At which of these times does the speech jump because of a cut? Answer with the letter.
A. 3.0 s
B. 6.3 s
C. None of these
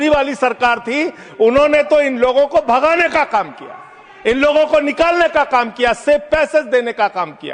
C